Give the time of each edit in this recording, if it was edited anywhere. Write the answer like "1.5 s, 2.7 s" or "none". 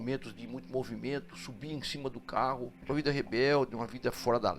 2.8 s